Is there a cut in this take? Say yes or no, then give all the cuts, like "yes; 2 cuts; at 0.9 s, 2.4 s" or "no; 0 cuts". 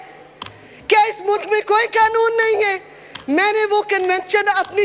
no; 0 cuts